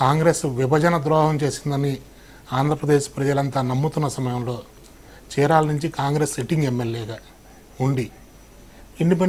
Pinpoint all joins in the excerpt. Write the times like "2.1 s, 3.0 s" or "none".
none

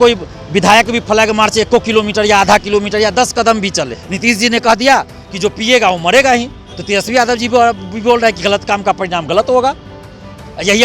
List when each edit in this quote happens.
4.0 s

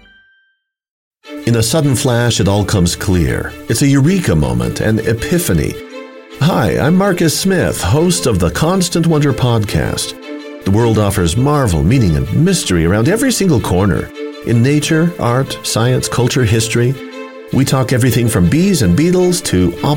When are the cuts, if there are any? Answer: 1.1 s

